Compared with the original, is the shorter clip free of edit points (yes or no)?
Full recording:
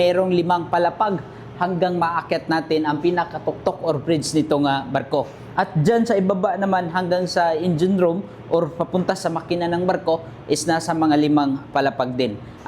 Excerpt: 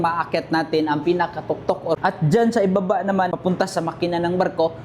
no